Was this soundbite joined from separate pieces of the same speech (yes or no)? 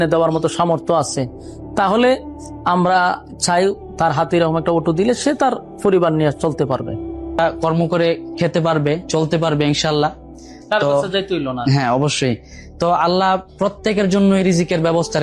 yes